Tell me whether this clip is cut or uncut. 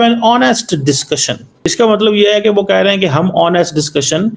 cut